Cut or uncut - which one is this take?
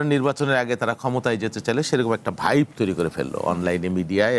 uncut